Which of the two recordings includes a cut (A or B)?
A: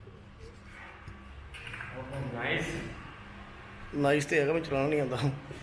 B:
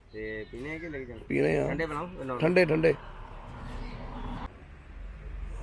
B